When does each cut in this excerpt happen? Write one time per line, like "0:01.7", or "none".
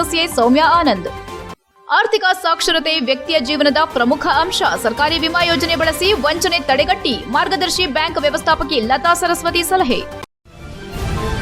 0:10.2